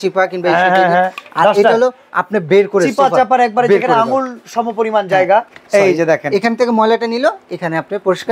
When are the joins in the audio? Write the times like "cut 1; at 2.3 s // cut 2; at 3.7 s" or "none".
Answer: cut 1; at 5.5 s